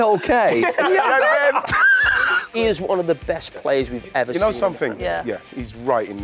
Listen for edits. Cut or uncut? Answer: cut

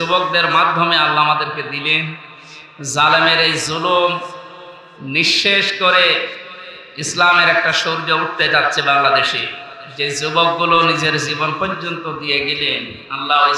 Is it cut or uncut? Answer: uncut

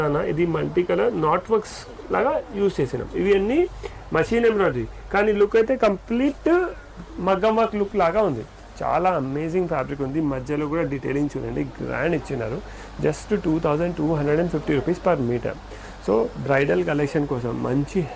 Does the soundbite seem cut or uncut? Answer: uncut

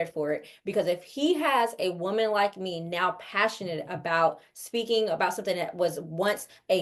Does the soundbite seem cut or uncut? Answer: uncut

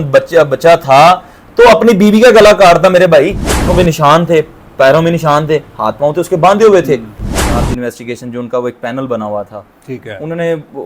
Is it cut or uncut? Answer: cut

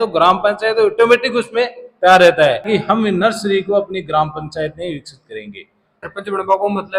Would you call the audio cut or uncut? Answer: cut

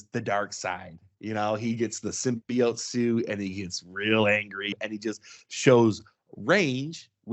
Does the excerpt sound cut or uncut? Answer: cut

